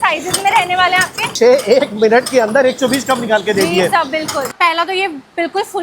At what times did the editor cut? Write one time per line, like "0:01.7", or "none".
0:01.3
0:04.5